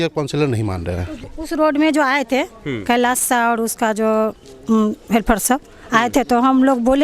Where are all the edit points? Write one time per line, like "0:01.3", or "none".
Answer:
0:01.3